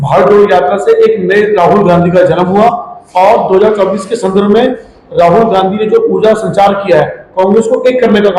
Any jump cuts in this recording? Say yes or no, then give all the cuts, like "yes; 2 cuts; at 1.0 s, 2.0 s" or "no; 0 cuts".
no; 0 cuts